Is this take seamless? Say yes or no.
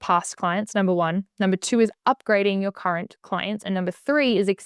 yes